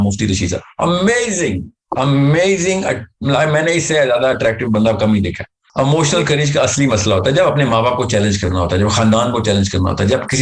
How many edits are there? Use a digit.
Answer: 1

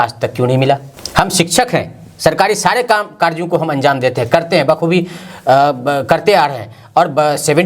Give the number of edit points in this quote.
0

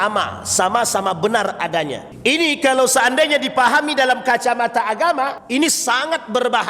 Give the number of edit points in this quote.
2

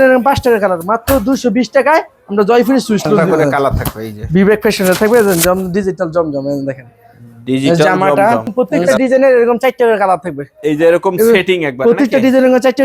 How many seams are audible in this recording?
2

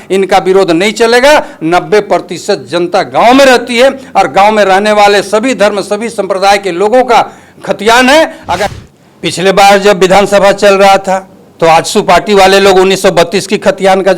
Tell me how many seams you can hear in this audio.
1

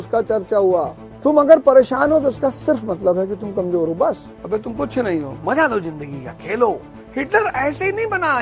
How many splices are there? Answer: 3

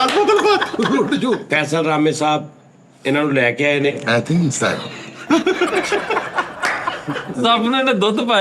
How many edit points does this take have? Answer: 2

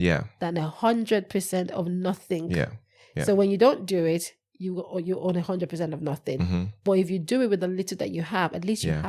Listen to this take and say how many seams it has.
0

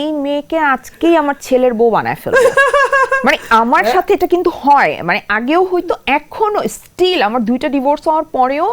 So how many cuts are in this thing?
0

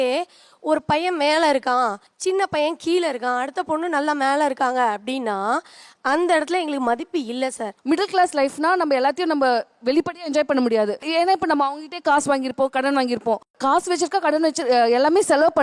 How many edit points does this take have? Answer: 3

